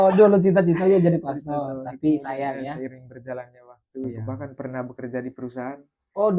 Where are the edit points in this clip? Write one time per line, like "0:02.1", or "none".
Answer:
0:04.2